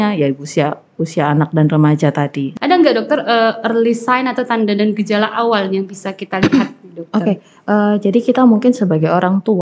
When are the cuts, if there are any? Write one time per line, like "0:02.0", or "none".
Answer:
0:02.5